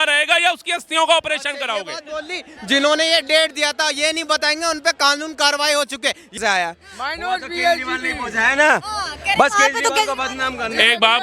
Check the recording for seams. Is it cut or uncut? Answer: cut